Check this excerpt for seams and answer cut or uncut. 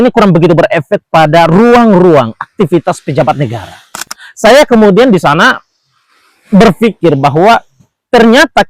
cut